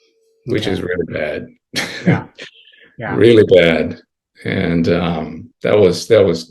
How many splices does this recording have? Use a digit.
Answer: 1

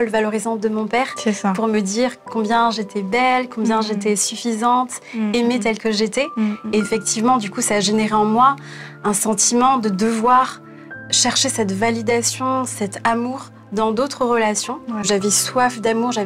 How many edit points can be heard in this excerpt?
1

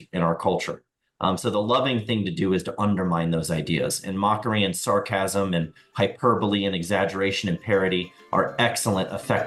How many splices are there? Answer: 0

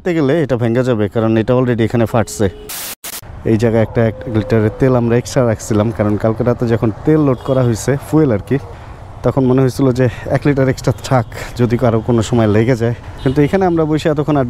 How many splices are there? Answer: 1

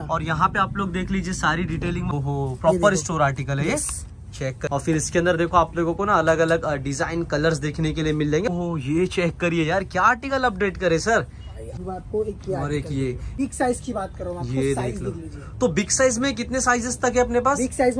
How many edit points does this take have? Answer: 5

